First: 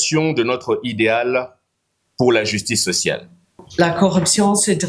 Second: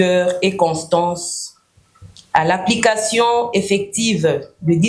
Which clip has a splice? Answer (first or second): first